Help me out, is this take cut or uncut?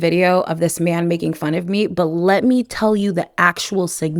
uncut